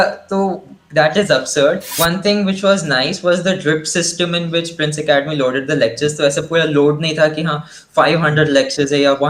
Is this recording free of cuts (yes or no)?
no